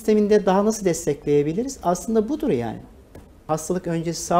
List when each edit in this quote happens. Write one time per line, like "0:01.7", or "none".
0:03.4